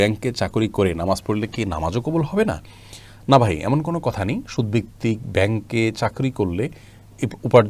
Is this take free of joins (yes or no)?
yes